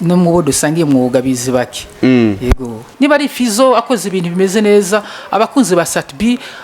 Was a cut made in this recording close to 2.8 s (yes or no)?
yes